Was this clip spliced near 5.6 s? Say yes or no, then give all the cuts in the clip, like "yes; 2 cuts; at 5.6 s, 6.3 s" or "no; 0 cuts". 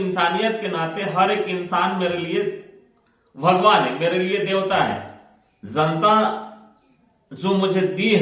no; 0 cuts